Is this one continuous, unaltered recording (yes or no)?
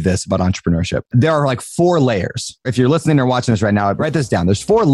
no